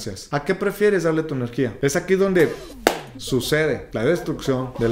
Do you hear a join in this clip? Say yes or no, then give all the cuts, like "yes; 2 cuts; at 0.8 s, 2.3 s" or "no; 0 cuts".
yes; 1 cut; at 1.7 s